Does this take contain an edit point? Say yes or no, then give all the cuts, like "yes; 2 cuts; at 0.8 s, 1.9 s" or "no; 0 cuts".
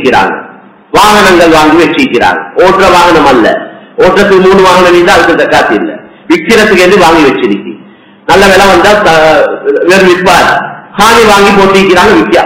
no; 0 cuts